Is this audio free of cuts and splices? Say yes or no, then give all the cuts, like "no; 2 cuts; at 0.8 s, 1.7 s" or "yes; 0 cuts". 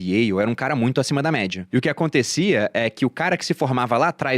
no; 1 cut; at 1.6 s